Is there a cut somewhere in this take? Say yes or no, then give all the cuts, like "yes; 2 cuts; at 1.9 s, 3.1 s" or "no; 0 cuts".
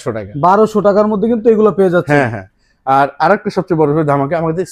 no; 0 cuts